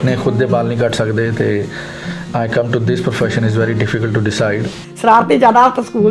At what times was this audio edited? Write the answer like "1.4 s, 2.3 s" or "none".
4.8 s